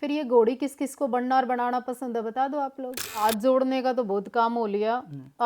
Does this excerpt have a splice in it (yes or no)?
yes